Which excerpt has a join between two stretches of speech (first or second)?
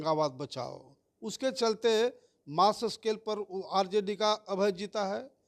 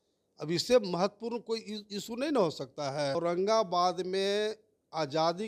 second